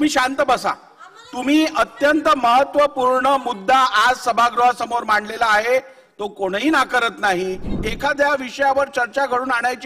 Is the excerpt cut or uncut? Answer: cut